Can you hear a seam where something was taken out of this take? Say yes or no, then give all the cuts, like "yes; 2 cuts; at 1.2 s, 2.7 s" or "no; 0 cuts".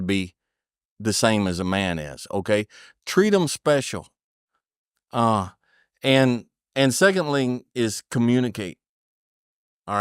no; 0 cuts